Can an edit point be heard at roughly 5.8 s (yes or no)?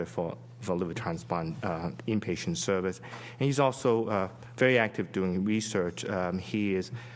no